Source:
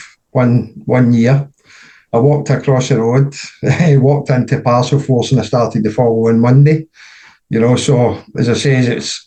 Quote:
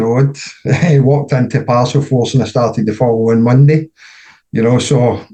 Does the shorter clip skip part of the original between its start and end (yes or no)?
no